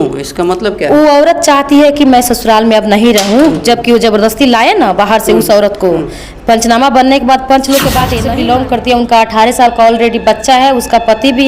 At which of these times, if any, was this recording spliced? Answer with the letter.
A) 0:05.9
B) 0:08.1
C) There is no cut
B